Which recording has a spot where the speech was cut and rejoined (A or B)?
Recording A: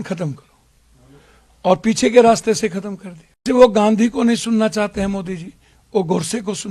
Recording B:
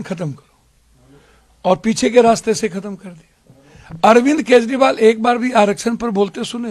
A